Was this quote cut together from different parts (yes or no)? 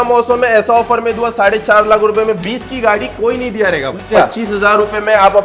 yes